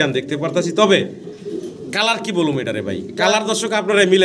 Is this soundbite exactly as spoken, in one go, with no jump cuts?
yes; 0 cuts

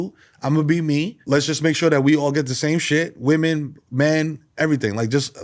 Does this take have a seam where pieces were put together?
yes; 1 cut; at 1.2 s

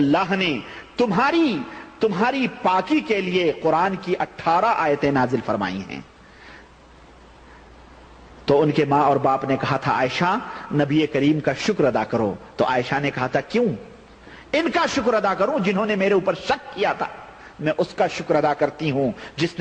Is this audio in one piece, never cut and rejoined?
yes; 0 cuts

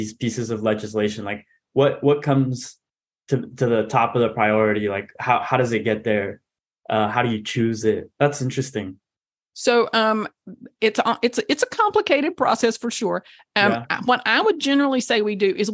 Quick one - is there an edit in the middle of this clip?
no; 0 cuts

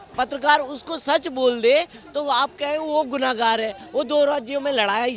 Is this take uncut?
yes; 0 cuts

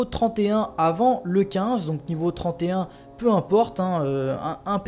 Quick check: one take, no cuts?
no; 1 cut; at 3.3 s

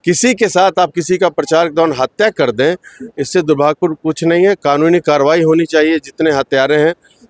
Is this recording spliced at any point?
no; 0 cuts

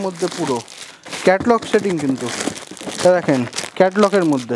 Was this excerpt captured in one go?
yes; 0 cuts

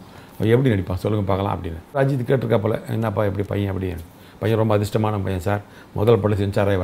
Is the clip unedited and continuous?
no; 1 cut; at 2.0 s

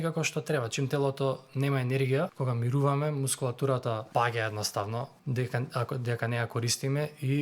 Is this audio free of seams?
no; 3 cuts; at 2.3 s, 4.0 s, 5.2 s

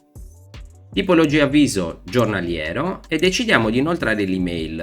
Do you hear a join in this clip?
yes; 1 cut; at 1.0 s

